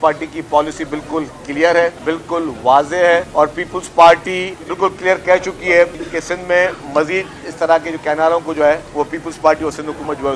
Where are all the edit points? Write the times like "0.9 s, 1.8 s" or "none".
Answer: 2.0 s, 3.3 s, 4.6 s, 6.0 s, 8.9 s